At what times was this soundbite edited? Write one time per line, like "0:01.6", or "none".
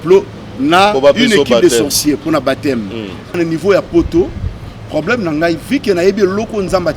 0:03.4